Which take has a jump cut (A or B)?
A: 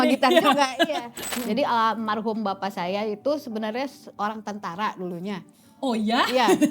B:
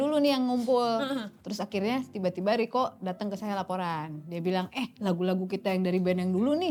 A